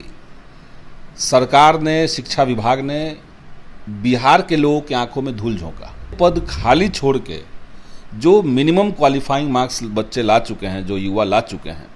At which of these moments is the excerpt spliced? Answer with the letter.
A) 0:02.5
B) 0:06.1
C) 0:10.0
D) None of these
B